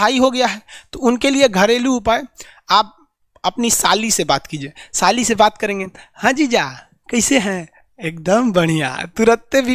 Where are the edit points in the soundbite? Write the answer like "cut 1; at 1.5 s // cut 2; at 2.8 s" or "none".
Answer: none